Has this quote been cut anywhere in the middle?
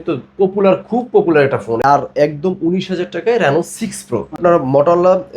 yes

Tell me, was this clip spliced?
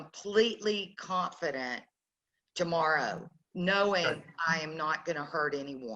no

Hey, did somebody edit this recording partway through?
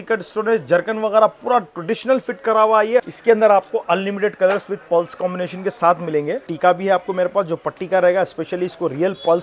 yes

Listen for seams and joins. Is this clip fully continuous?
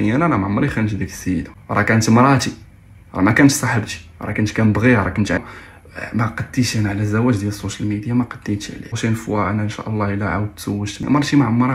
no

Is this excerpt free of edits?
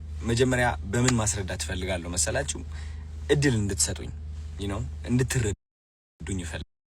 yes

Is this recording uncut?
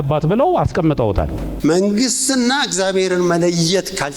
no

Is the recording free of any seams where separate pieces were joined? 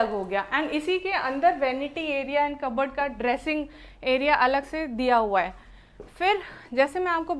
yes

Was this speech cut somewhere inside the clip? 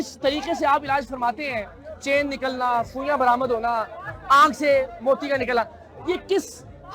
no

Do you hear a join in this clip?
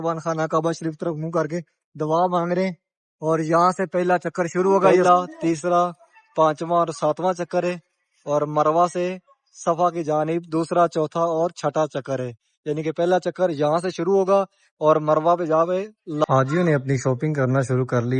yes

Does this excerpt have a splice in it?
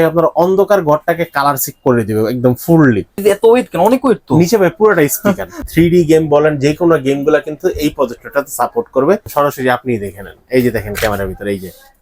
yes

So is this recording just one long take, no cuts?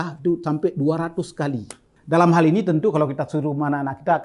no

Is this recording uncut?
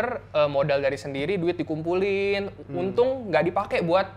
yes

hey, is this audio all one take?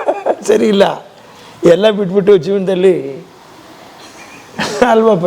yes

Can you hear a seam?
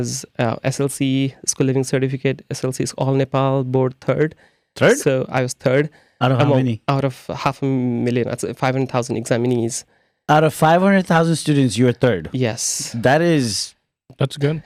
no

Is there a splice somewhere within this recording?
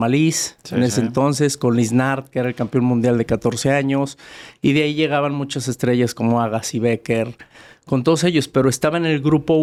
no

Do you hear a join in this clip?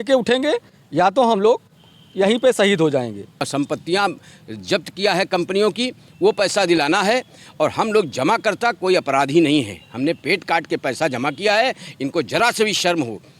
yes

